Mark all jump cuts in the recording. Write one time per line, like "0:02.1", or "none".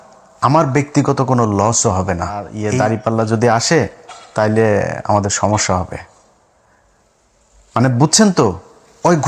0:02.6